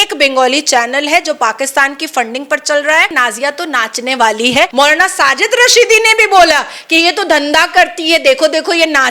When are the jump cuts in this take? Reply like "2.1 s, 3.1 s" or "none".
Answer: 3.1 s, 4.7 s